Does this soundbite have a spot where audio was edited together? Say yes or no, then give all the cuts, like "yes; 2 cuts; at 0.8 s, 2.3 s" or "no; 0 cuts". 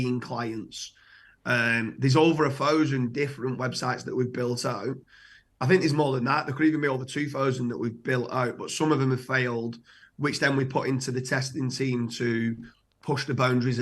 no; 0 cuts